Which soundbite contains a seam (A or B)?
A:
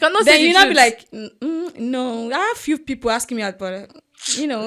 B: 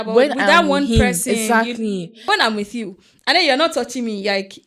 B